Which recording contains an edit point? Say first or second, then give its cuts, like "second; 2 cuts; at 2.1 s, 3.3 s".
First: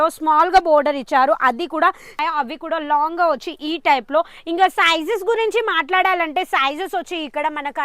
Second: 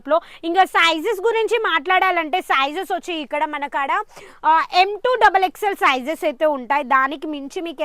first; 1 cut; at 2.1 s